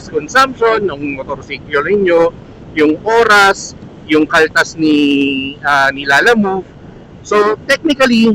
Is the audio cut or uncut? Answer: uncut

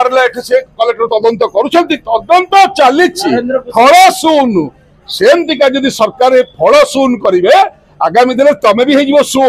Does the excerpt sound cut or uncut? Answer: uncut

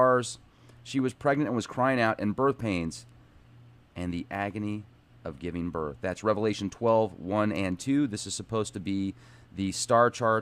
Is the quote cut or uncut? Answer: cut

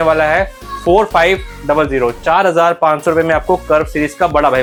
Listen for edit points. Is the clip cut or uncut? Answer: uncut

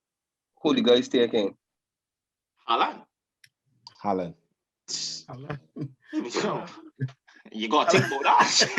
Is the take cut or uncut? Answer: uncut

